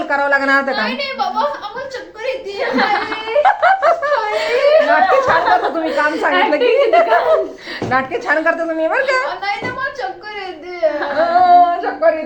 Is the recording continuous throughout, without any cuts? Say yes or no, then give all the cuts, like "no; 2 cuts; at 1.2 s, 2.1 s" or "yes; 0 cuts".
yes; 0 cuts